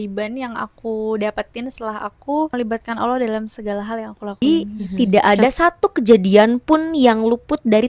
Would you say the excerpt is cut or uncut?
cut